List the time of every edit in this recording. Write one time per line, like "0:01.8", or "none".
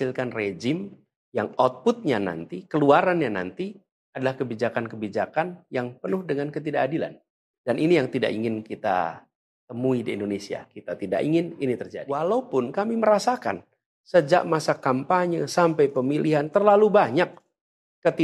0:12.0